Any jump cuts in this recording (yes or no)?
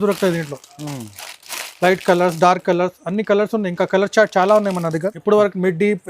yes